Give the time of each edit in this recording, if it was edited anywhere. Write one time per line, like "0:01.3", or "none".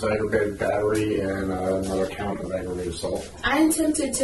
0:03.3